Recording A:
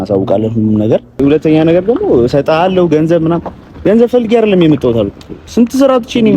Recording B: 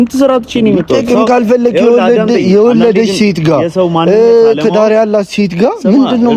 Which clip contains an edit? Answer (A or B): A